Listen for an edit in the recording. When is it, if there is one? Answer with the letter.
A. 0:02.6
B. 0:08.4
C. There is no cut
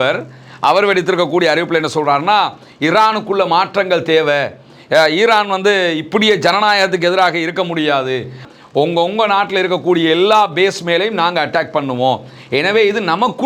B